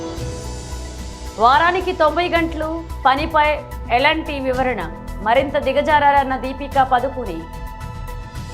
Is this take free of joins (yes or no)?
no